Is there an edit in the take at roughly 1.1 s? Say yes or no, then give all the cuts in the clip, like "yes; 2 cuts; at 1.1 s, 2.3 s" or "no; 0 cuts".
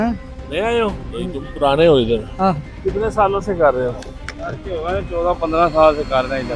no; 0 cuts